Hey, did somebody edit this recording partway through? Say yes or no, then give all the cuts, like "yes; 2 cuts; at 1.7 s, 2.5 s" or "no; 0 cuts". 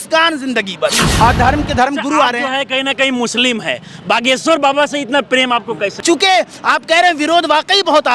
yes; 2 cuts; at 1.0 s, 6.0 s